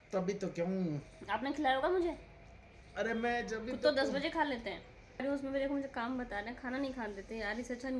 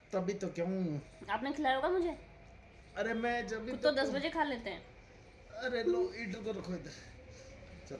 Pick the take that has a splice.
first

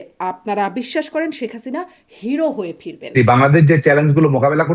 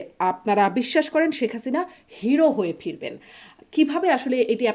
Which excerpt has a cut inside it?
first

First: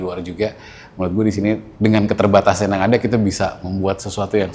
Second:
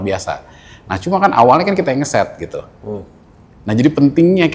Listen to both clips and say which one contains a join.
first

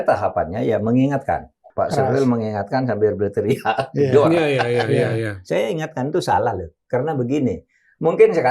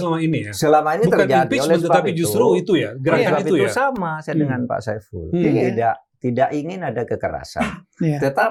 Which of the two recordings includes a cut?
first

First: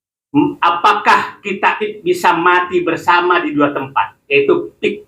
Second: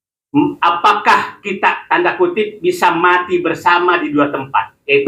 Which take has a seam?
first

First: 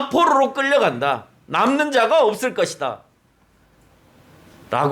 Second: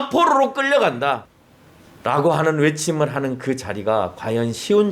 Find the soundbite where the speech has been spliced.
second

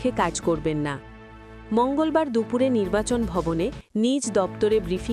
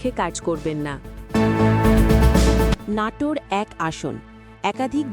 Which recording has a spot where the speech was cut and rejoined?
second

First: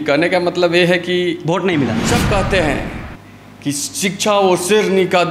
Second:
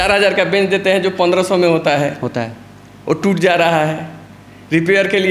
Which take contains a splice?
first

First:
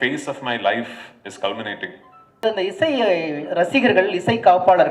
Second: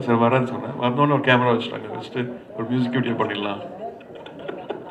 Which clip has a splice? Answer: first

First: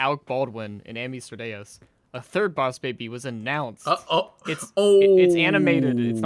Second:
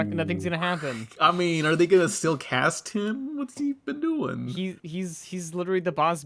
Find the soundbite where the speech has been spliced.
second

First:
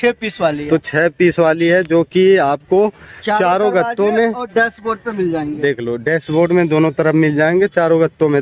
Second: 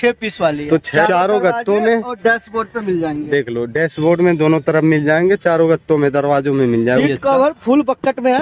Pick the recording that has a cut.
second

